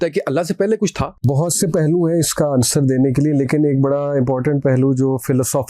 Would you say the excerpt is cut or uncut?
cut